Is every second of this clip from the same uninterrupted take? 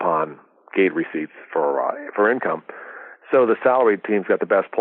yes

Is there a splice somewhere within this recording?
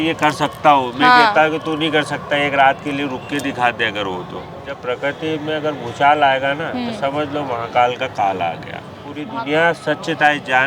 yes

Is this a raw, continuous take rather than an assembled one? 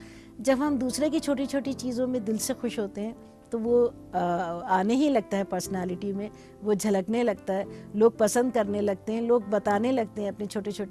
yes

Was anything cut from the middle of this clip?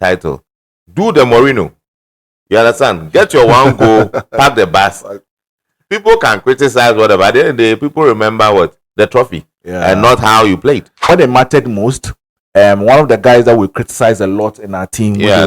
yes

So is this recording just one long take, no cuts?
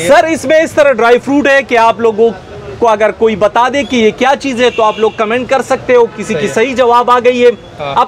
yes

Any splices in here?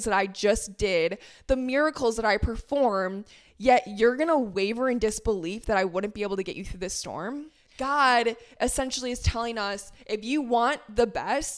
yes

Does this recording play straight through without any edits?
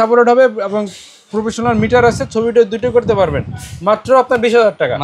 yes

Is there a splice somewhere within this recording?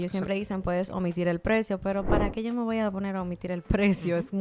no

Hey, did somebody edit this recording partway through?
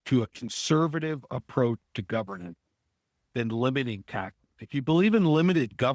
no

